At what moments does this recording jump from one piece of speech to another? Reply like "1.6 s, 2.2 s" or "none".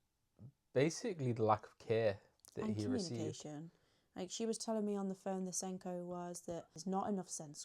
6.7 s

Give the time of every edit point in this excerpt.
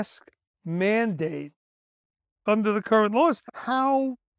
3.4 s

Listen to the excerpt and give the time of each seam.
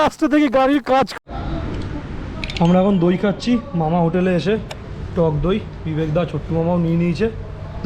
1.1 s

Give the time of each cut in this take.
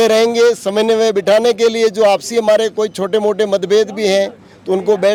none

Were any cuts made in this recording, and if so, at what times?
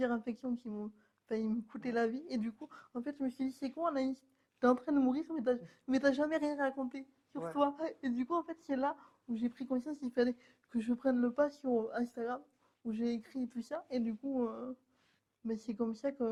none

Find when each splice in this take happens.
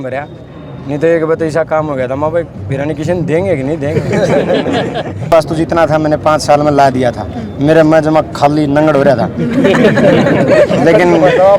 5.3 s

